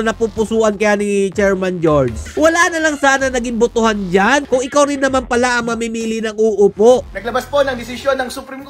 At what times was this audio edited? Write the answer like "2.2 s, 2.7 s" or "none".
2.2 s, 4.4 s, 7.1 s

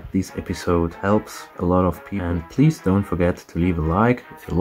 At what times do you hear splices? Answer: 2.2 s

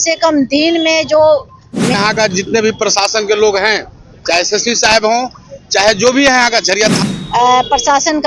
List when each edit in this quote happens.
1.9 s, 7.0 s

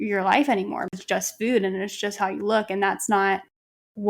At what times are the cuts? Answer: 0.9 s

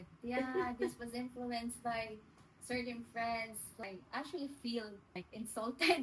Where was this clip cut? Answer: 3.8 s, 5.2 s

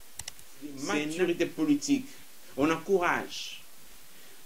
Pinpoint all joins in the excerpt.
0.9 s

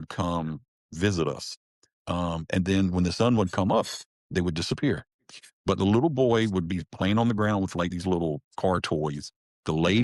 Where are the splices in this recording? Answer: none

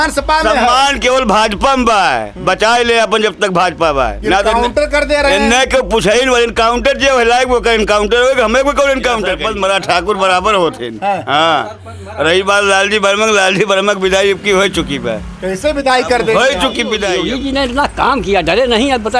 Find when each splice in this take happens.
9.4 s, 17.1 s

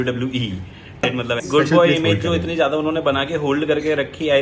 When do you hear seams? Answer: 0.9 s

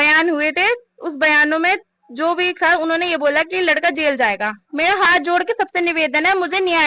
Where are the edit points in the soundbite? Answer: 4.6 s

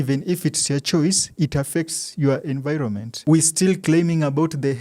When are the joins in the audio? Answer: 3.1 s

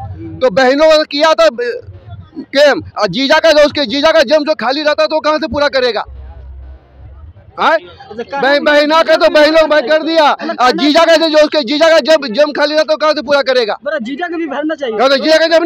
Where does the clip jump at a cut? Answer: none

